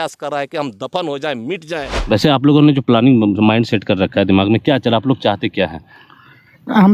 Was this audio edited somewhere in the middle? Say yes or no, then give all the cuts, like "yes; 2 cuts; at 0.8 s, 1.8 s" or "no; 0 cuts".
yes; 1 cut; at 1.9 s